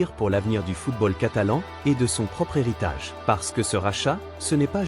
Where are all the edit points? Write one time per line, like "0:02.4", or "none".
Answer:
0:03.1